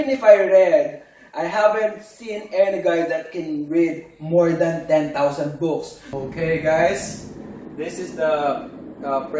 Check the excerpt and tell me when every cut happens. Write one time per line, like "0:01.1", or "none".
0:06.0